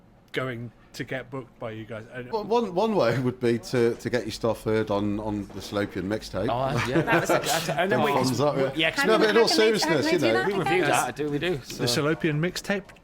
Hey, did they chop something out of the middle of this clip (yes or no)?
yes